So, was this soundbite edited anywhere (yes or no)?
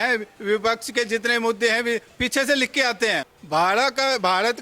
yes